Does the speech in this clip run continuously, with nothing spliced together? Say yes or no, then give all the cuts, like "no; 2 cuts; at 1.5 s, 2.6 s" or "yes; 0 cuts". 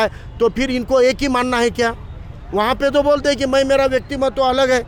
yes; 0 cuts